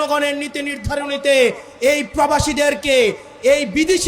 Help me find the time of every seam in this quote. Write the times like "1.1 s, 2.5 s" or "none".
none